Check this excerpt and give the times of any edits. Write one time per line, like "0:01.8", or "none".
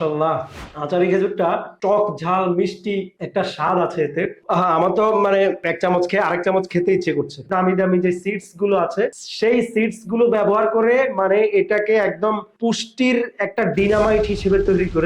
0:04.4
0:07.5